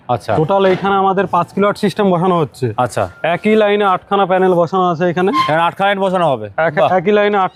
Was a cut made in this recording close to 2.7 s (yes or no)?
no